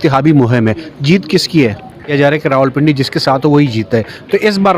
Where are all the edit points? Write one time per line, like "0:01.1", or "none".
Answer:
0:02.1